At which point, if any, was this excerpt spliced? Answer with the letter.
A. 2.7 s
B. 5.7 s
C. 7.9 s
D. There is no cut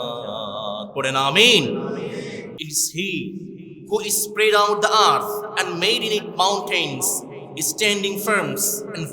A